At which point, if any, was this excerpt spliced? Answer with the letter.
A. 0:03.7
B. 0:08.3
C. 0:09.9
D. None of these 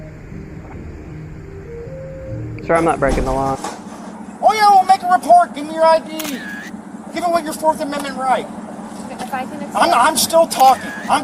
A